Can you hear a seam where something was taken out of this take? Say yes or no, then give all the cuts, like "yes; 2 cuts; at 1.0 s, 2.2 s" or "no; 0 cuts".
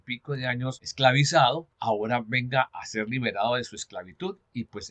yes; 3 cuts; at 0.9 s, 1.7 s, 2.8 s